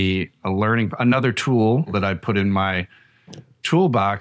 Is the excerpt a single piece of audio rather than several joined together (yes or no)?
no